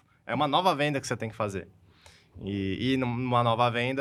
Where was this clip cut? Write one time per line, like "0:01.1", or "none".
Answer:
none